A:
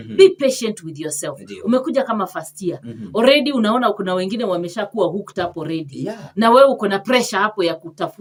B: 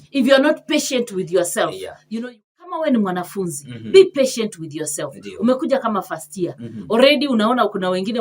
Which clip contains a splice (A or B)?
B